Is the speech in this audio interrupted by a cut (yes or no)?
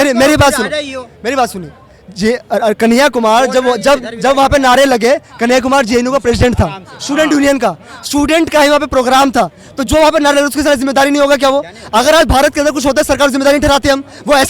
no